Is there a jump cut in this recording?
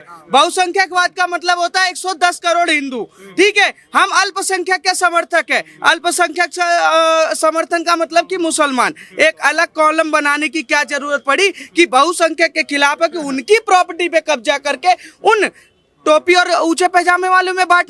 no; 0 cuts

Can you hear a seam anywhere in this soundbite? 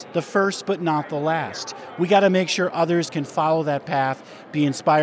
no; 0 cuts

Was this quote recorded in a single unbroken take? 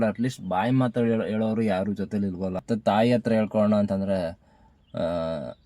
no; 1 cut; at 2.6 s

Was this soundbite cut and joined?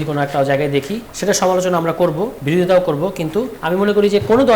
yes; 3 cuts; at 1.0 s, 2.4 s, 3.6 s

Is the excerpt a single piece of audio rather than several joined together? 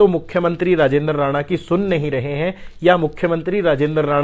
yes; 0 cuts

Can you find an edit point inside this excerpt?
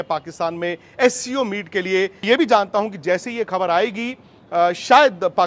yes; 1 cut; at 2.2 s

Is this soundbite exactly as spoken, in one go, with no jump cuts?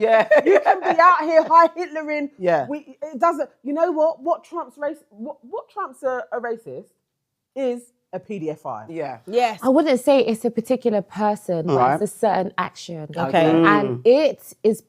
no; 1 cut; at 9.6 s

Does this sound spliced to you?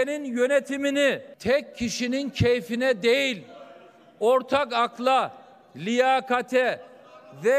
yes; 1 cut; at 1.3 s

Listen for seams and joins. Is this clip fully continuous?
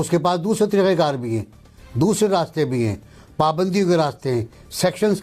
yes; 0 cuts

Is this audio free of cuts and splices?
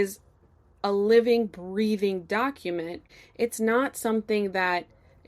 no; 1 cut; at 3.1 s

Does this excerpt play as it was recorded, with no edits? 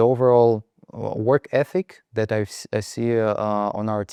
yes; 0 cuts

